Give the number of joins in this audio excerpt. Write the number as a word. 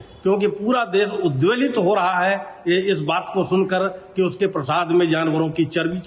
zero